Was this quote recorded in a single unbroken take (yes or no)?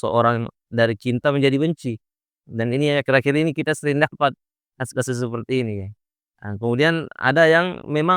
yes